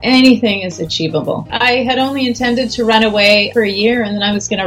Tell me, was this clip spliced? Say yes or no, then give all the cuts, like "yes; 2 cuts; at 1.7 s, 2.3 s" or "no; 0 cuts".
yes; 2 cuts; at 1.5 s, 3.5 s